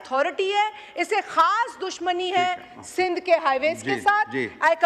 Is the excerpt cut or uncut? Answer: uncut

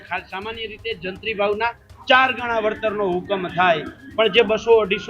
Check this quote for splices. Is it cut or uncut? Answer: uncut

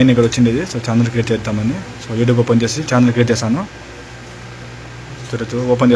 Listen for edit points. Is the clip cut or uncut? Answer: uncut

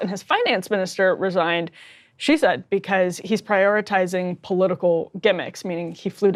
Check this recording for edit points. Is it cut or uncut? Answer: uncut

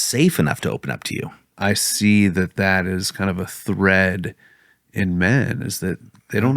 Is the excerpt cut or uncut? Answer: cut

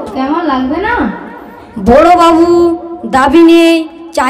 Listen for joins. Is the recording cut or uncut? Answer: uncut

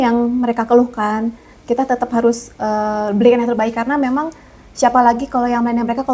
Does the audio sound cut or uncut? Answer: uncut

